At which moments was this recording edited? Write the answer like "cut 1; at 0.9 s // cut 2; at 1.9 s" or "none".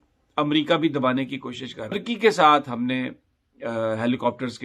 cut 1; at 2.0 s